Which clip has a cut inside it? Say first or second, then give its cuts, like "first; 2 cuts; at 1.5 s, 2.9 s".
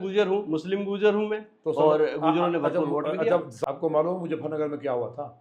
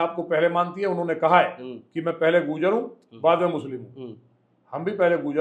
first; 1 cut; at 3.5 s